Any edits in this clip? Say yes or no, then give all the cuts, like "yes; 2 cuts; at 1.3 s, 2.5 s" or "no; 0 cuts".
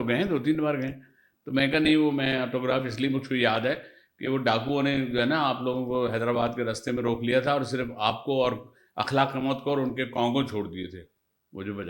no; 0 cuts